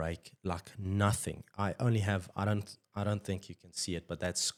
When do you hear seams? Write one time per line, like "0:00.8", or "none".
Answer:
none